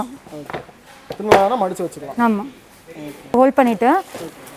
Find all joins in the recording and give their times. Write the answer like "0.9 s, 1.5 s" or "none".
3.3 s